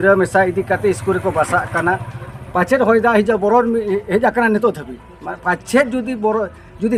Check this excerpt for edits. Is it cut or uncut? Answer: uncut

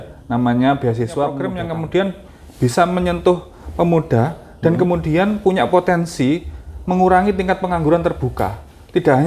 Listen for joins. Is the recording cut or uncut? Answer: cut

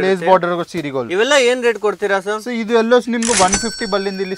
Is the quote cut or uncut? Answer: uncut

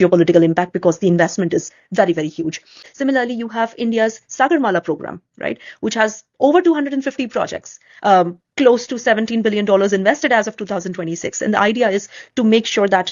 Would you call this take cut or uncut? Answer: cut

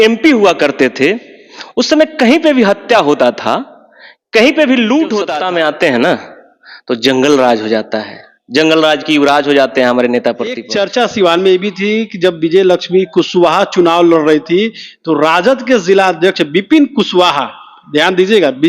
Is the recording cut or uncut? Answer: cut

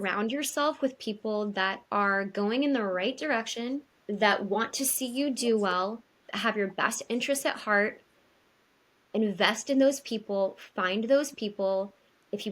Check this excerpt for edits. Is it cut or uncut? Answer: cut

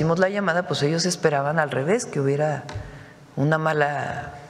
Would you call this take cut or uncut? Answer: uncut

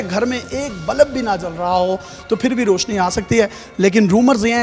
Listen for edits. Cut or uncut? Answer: uncut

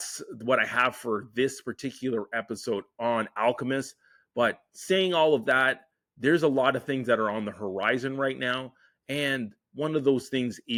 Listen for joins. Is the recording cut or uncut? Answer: uncut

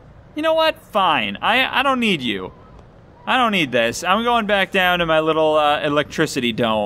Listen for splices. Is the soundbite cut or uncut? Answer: uncut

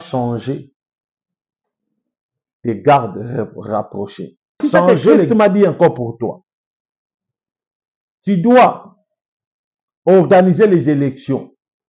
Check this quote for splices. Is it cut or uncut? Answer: cut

